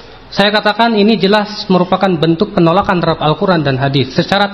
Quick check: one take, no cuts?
yes; 0 cuts

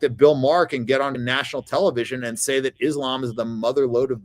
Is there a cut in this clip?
yes; 1 cut; at 1.2 s

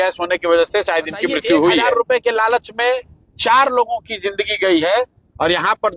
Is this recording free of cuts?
no; 1 cut; at 1.9 s

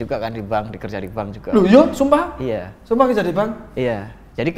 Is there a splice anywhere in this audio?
no; 0 cuts

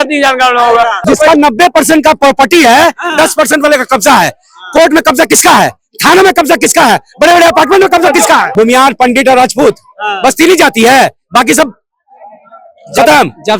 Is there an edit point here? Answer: yes; 2 cuts; at 1.0 s, 8.5 s

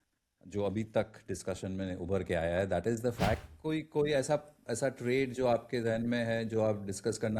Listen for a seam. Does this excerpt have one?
yes; 1 cut; at 3.4 s

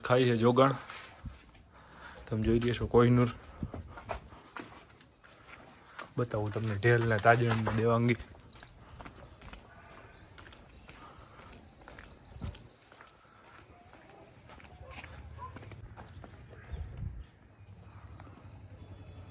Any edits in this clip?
yes; 1 cut; at 15.8 s

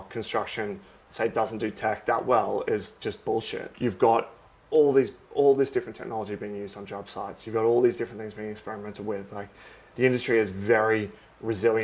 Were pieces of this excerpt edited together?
yes; 1 cut; at 3.7 s

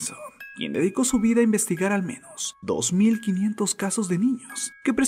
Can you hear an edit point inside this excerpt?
no; 0 cuts

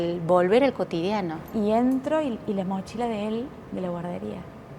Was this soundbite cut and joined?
yes; 1 cut; at 1.4 s

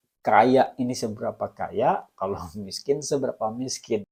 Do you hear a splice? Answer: no; 0 cuts

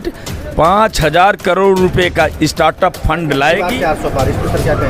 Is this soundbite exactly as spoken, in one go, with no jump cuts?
no; 1 cut; at 3.7 s

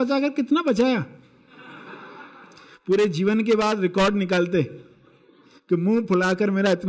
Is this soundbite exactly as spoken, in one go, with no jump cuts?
yes; 0 cuts

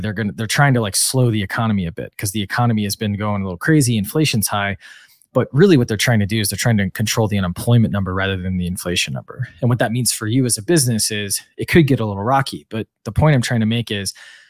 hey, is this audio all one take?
yes; 0 cuts

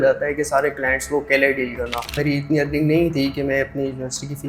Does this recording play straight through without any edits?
no; 1 cut; at 2.2 s

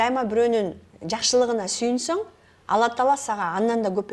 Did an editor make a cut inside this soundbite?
no; 0 cuts

